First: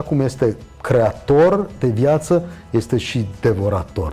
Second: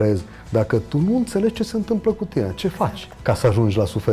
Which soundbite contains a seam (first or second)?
second